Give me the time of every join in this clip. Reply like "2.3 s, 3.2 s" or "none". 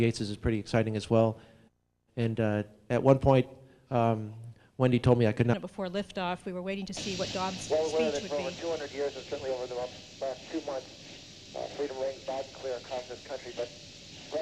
none